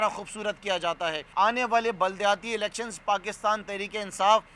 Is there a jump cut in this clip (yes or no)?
yes